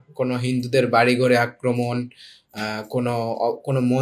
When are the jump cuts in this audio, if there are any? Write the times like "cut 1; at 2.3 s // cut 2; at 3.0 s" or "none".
none